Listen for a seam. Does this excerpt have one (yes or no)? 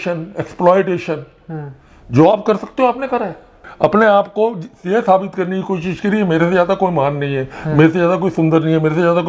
no